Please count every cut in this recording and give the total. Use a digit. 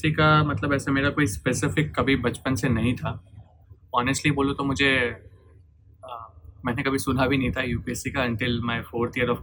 0